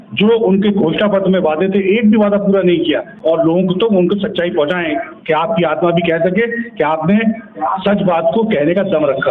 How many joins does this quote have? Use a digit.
1